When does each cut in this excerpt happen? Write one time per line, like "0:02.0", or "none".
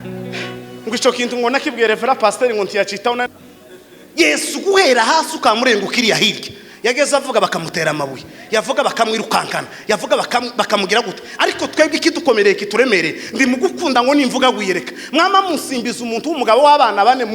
0:03.3